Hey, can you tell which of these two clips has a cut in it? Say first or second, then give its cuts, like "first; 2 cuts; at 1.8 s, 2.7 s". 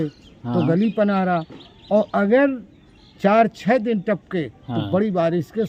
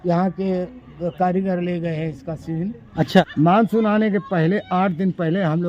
second; 1 cut; at 3.2 s